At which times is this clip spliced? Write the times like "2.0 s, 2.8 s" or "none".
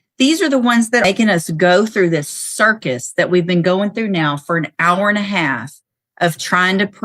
1.0 s